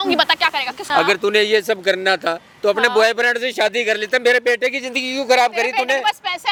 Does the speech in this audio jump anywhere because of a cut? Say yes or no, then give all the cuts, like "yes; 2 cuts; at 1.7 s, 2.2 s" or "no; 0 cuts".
no; 0 cuts